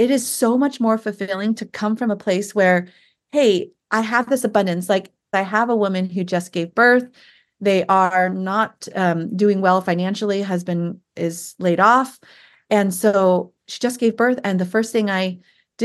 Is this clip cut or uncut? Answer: cut